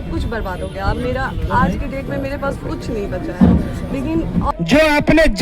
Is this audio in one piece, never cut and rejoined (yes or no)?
no